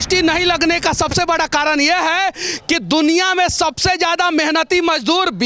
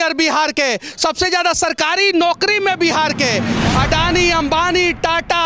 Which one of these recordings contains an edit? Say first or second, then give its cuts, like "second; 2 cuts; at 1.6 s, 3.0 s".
second; 1 cut; at 3.6 s